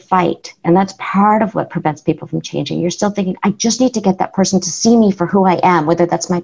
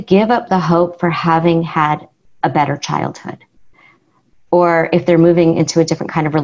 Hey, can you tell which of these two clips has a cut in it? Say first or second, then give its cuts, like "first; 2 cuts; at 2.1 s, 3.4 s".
first; 1 cut; at 4.7 s